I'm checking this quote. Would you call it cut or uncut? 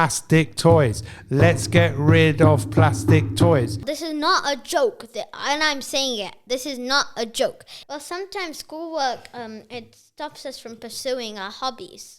cut